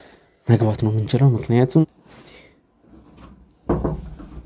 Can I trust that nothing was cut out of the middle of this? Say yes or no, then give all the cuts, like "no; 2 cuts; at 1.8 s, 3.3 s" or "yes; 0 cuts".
no; 1 cut; at 1.8 s